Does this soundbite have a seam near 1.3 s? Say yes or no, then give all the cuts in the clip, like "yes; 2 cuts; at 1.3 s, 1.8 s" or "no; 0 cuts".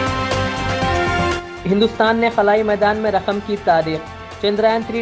yes; 1 cut; at 1.3 s